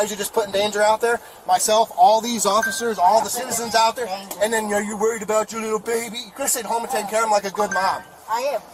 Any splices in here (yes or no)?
no